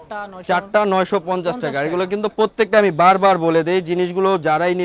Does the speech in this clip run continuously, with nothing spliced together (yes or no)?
yes